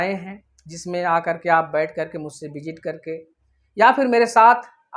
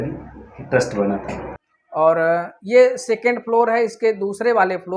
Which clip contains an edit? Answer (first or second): second